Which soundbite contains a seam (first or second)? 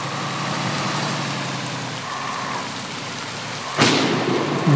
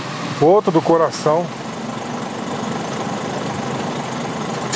second